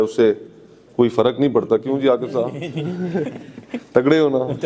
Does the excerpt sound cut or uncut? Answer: uncut